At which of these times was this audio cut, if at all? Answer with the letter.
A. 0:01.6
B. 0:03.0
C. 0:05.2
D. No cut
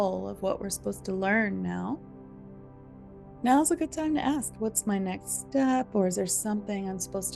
D